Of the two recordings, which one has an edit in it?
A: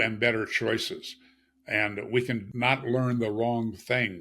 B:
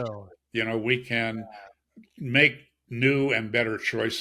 A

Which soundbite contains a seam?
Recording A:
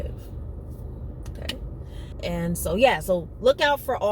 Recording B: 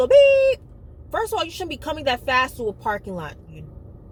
A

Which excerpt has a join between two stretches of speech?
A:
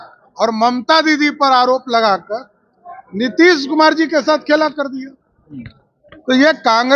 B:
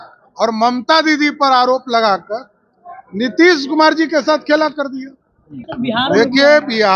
B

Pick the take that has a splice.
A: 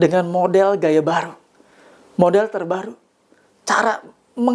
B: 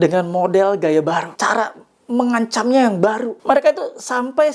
B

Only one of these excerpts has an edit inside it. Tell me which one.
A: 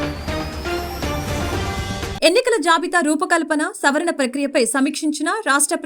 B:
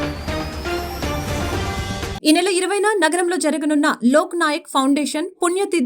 A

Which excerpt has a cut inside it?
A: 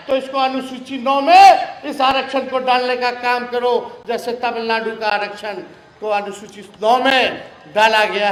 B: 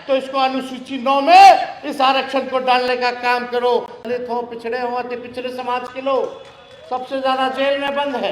B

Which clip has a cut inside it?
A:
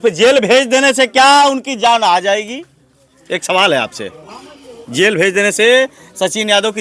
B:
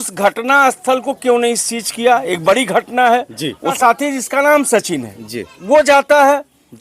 B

